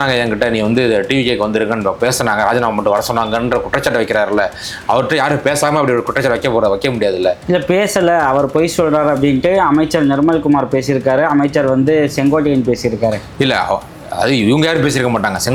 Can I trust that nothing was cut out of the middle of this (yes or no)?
yes